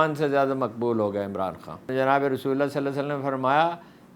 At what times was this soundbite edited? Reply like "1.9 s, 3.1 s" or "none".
1.9 s